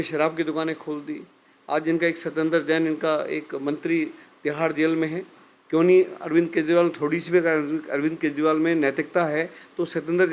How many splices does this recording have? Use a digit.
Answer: 0